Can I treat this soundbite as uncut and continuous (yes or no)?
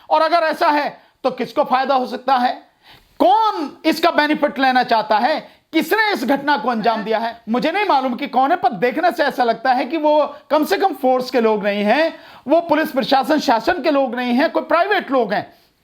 no